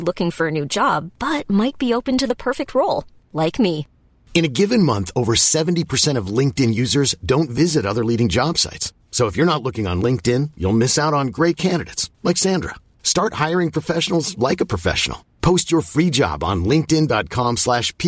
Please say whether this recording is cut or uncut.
uncut